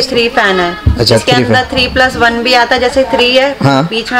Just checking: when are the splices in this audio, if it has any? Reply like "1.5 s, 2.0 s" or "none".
none